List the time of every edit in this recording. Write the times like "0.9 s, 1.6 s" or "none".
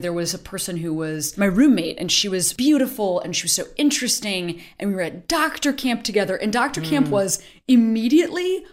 1.3 s, 2.5 s